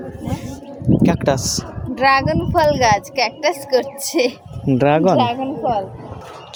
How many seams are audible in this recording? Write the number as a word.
zero